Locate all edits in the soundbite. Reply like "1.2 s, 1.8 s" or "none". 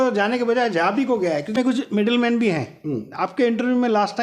1.6 s